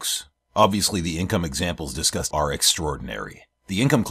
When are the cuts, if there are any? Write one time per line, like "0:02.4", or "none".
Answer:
0:02.3